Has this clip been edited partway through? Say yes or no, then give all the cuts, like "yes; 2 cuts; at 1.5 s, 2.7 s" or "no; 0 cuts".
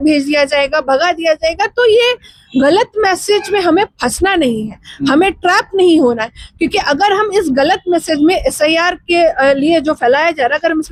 no; 0 cuts